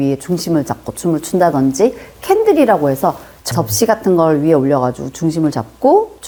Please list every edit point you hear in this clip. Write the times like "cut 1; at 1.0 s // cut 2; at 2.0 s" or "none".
none